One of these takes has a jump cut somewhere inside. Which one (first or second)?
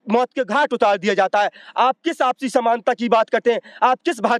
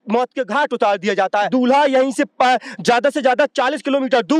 second